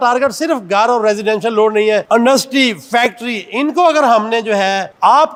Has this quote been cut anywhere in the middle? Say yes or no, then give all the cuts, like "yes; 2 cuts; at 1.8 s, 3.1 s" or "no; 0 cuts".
no; 0 cuts